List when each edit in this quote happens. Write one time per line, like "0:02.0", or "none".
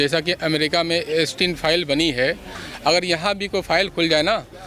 none